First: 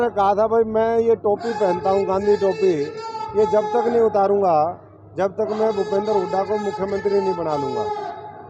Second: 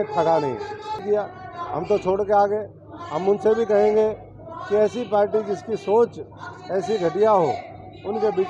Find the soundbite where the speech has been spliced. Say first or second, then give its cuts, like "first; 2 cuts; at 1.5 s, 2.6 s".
second; 1 cut; at 1.0 s